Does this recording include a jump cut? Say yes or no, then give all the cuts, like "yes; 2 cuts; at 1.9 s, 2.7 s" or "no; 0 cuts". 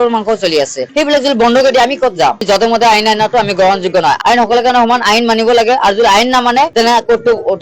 yes; 1 cut; at 2.4 s